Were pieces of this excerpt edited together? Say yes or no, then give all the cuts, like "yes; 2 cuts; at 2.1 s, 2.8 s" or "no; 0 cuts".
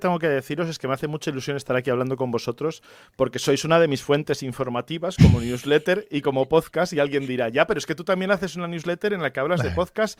no; 0 cuts